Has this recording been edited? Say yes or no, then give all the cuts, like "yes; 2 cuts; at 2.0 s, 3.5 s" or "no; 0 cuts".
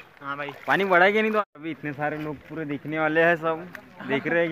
yes; 1 cut; at 1.4 s